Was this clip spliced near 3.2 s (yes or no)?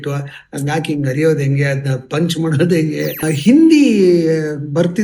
yes